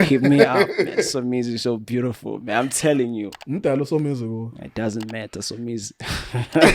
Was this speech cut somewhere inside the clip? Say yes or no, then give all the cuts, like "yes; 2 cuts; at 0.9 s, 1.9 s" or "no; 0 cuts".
yes; 1 cut; at 3.4 s